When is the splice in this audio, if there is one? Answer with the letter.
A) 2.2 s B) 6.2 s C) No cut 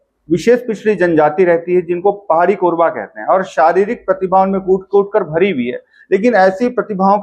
C